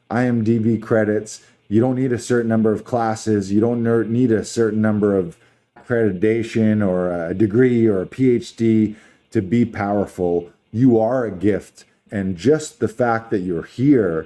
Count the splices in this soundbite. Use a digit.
2